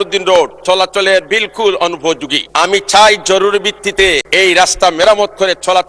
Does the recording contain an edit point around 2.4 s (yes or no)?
yes